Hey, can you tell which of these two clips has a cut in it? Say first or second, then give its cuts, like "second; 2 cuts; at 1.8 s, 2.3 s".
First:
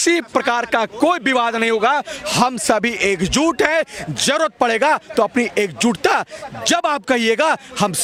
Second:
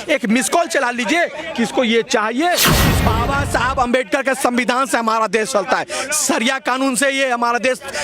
second; 1 cut; at 2.9 s